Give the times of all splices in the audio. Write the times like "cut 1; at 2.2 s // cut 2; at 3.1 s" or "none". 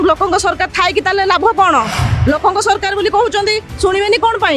cut 1; at 2.0 s